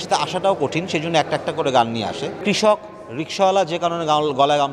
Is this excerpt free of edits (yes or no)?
no